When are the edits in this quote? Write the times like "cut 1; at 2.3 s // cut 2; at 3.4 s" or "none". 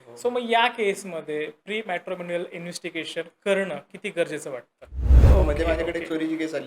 cut 1; at 5.1 s